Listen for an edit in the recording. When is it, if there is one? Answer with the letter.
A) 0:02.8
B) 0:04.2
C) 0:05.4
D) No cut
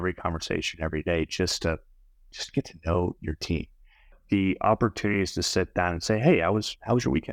B